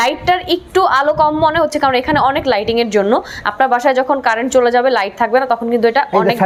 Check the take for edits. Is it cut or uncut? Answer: uncut